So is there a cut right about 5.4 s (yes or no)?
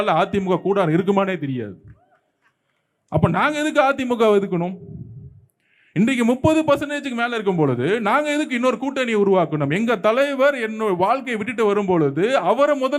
no